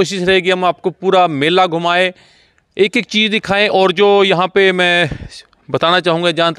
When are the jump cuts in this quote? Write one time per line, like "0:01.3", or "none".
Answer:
none